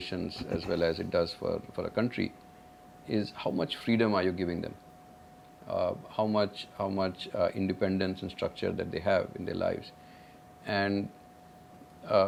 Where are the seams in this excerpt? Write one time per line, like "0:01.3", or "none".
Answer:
none